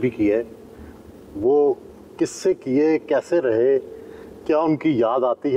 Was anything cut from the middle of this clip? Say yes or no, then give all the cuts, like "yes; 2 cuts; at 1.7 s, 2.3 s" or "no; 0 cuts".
no; 0 cuts